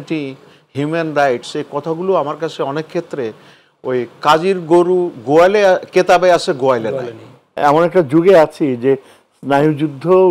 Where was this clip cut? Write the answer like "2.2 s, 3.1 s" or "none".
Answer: 7.6 s